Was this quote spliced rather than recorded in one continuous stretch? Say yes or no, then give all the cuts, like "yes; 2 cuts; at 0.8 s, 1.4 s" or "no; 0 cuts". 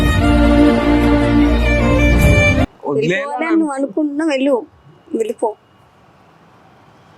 yes; 1 cut; at 2.6 s